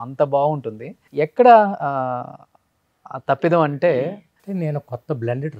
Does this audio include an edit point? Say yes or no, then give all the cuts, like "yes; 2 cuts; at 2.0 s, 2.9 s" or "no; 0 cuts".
no; 0 cuts